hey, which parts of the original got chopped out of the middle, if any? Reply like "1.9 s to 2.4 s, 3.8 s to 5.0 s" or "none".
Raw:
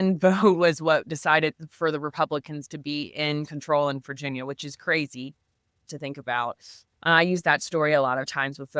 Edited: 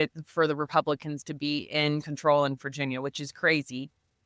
none